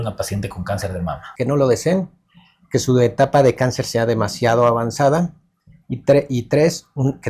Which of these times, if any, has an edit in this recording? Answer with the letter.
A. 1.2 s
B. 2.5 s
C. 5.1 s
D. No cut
A